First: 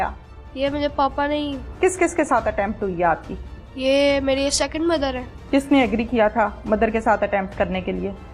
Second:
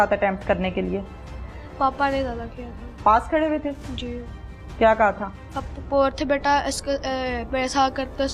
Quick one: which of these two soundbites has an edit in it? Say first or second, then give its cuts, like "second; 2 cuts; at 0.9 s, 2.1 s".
first; 2 cuts; at 1.7 s, 5.3 s